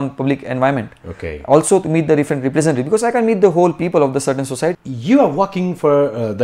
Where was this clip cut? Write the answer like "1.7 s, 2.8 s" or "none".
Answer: 4.9 s